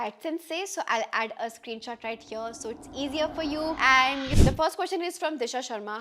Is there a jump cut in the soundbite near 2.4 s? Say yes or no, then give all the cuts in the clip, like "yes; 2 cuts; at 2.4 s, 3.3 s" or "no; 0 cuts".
no; 1 cut; at 4.3 s